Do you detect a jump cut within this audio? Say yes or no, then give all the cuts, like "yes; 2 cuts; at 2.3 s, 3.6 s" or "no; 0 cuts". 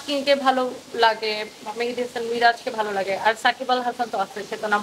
no; 0 cuts